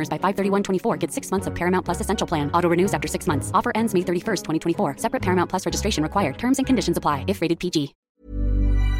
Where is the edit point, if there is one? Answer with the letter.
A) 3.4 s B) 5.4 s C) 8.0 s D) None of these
C